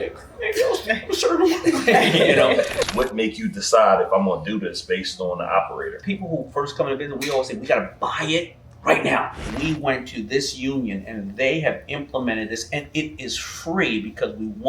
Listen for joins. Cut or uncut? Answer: cut